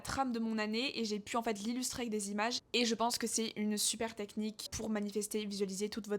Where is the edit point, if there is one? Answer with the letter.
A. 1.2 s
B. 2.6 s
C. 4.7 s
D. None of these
C